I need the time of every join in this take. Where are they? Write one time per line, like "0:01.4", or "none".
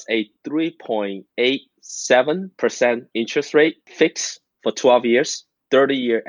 0:01.2
0:02.5
0:03.8